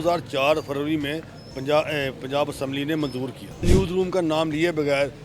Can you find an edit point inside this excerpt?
yes; 1 cut; at 3.6 s

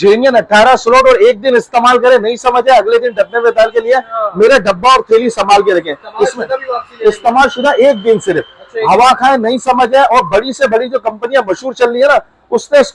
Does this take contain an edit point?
no; 0 cuts

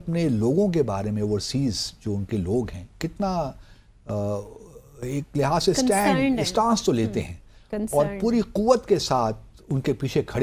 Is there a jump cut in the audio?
no; 0 cuts

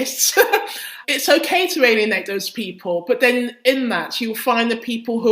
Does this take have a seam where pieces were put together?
no; 0 cuts

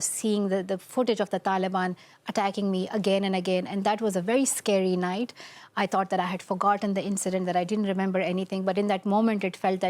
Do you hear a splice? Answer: no; 0 cuts

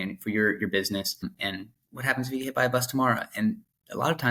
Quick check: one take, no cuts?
no; 1 cut; at 1.2 s

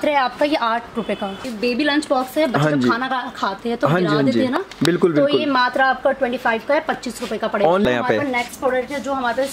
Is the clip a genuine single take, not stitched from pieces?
no; 2 cuts; at 1.4 s, 7.8 s

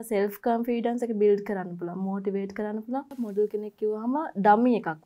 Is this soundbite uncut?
no; 1 cut; at 3.2 s

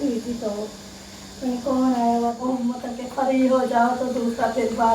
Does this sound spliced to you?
yes; 1 cut; at 2.4 s

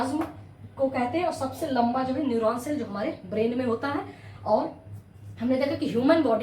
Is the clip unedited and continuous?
yes; 0 cuts

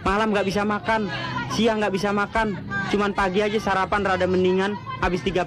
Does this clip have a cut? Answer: no; 0 cuts

